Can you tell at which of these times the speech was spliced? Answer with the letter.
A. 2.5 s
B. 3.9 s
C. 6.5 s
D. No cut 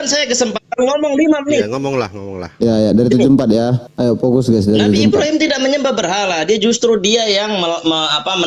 B